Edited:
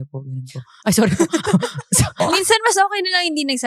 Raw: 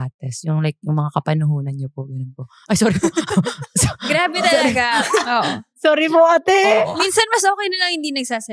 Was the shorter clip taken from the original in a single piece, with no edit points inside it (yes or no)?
no